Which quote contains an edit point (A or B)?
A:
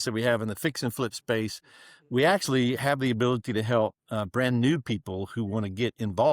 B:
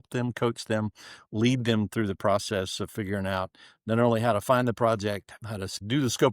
B